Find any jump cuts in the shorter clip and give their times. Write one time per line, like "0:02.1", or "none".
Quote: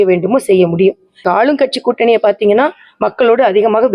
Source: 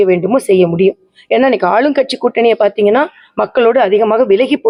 0:01.2

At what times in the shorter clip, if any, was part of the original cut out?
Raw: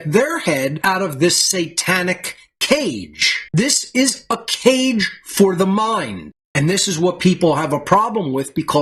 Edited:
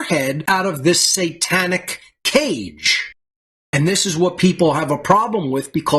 0:03.2

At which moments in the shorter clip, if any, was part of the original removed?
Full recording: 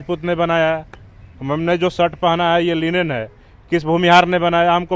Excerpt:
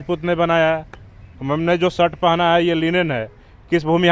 none

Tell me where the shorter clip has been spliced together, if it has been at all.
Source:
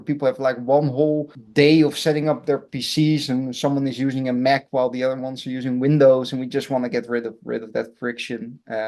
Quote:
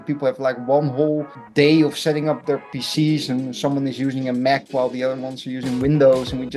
none

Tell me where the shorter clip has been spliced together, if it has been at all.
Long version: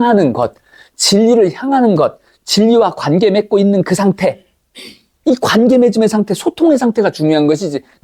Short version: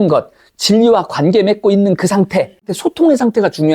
0:02.7

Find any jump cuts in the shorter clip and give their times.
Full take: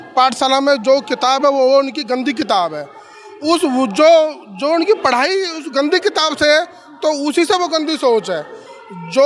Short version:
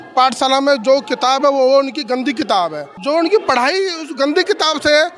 0:02.9

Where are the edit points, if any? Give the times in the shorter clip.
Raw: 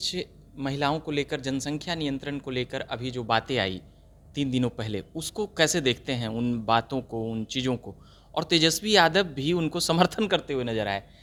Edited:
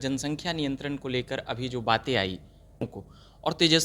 0:02.9

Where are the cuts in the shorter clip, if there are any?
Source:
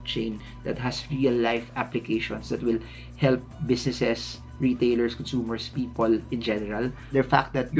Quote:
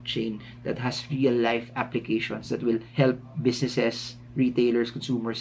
0:02.9

